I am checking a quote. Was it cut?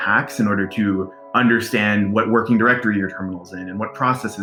no; 0 cuts

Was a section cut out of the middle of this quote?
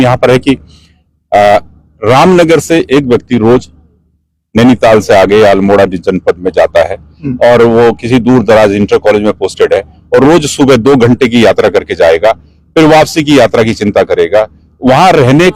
no; 0 cuts

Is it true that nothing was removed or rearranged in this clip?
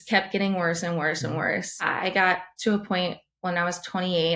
no; 1 cut; at 1.9 s

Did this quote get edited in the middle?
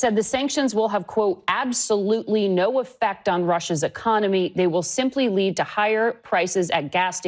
no; 0 cuts

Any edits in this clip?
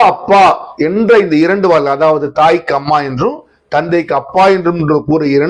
no; 0 cuts

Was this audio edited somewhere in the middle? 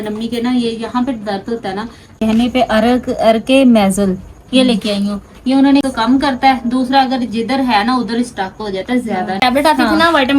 yes; 3 cuts; at 2.2 s, 5.8 s, 9.4 s

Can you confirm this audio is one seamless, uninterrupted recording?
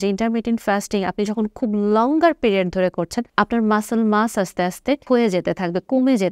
no; 2 cuts; at 3.2 s, 5.0 s

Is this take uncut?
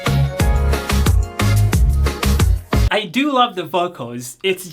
no; 1 cut; at 2.9 s

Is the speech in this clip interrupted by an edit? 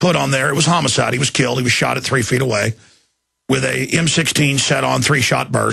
no; 0 cuts

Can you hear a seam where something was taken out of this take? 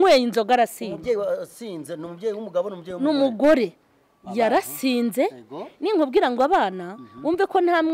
no; 0 cuts

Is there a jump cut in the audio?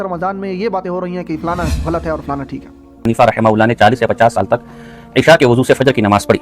yes; 1 cut; at 3.0 s

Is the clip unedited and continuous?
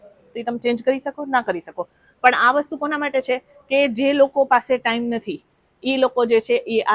yes; 0 cuts

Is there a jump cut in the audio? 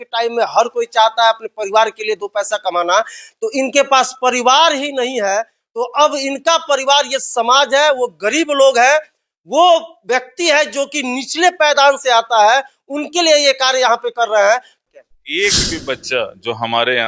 yes; 1 cut; at 14.8 s

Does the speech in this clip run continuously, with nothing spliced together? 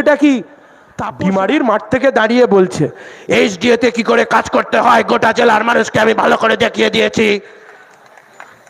no; 1 cut; at 1.0 s

